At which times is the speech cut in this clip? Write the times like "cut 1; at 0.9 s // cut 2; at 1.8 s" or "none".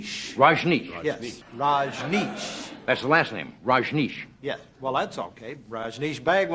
cut 1; at 1.3 s